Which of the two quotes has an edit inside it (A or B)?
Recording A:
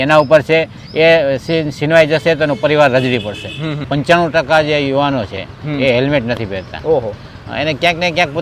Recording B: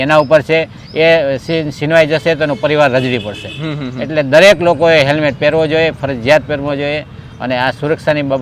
A